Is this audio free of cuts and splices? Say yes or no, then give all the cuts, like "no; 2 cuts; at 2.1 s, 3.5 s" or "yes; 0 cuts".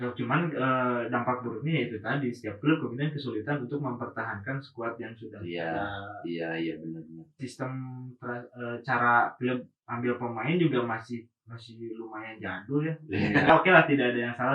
no; 2 cuts; at 7.4 s, 13.5 s